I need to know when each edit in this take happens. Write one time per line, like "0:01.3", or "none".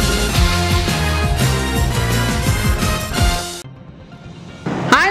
0:03.8